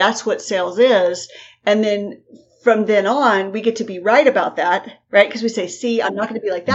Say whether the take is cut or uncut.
uncut